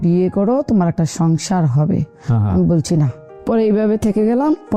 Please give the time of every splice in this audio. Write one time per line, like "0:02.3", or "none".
none

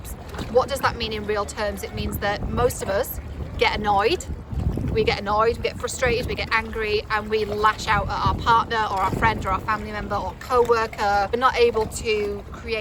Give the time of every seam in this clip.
0:11.3

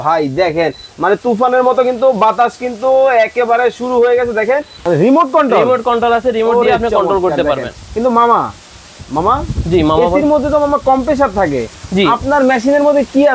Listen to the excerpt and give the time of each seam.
0:04.8

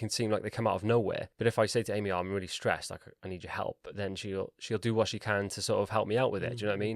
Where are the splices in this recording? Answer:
0:01.3

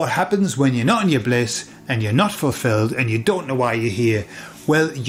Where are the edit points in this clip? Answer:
none

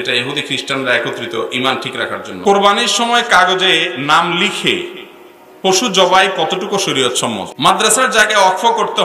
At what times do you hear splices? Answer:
0:02.5
0:07.5

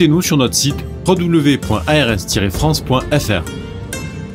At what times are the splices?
0:03.4

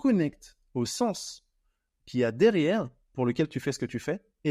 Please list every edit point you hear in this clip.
none

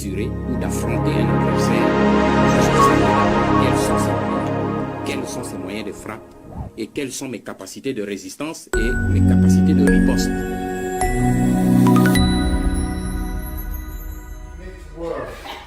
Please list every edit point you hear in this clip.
0:13.1

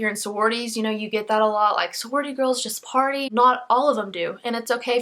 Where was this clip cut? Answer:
0:03.3

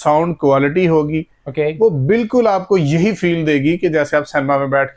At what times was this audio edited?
none

